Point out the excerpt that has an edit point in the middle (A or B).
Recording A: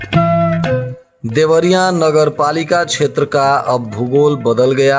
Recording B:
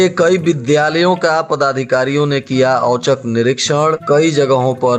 A